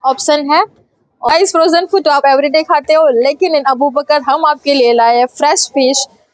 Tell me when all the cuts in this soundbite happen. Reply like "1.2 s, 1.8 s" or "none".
1.2 s